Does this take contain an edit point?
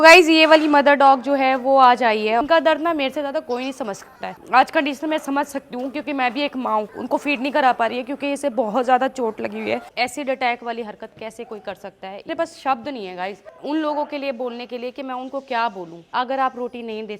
yes; 6 cuts; at 2.4 s, 4.4 s, 6.9 s, 9.9 s, 12.3 s, 16.1 s

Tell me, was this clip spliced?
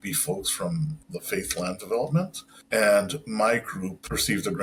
no; 0 cuts

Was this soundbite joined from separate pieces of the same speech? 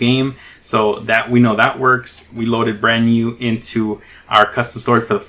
no; 0 cuts

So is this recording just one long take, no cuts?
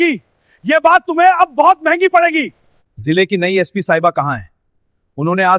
no; 1 cut; at 2.7 s

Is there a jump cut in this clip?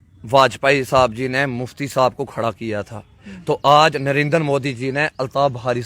no; 0 cuts

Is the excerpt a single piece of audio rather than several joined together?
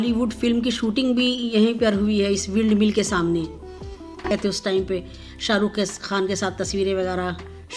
no; 1 cut; at 4.3 s

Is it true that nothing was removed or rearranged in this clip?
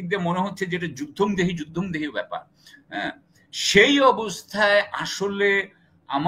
yes; 0 cuts

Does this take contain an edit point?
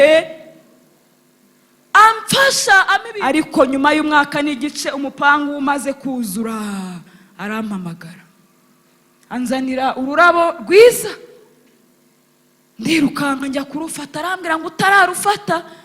yes; 1 cut; at 3.1 s

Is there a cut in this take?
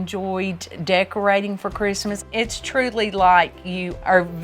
yes; 1 cut; at 2.2 s

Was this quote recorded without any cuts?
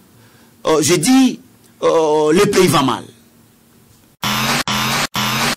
no; 1 cut; at 4.2 s

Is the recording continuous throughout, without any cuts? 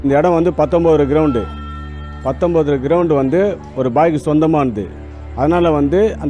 yes; 0 cuts

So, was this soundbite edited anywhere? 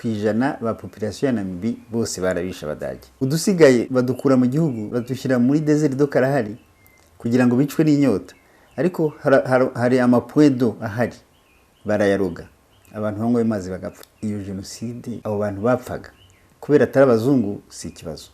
yes; 5 cuts; at 3.0 s, 3.9 s, 4.9 s, 14.1 s, 15.2 s

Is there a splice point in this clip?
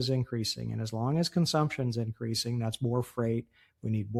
no; 0 cuts

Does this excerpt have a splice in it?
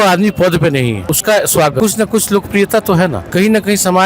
yes; 3 cuts; at 1.1 s, 1.8 s, 3.2 s

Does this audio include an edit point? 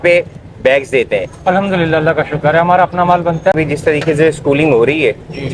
no; 0 cuts

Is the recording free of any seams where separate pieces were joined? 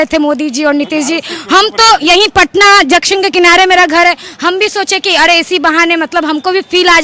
yes; 0 cuts

